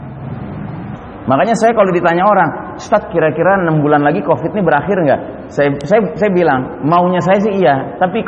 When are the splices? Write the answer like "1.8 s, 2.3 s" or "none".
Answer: 0.9 s